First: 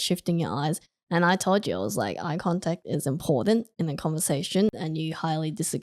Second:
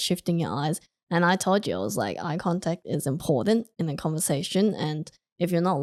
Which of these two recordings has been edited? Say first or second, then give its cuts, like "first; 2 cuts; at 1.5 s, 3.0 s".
first; 1 cut; at 4.8 s